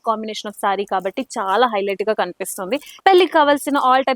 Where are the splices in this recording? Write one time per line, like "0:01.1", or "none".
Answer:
0:03.0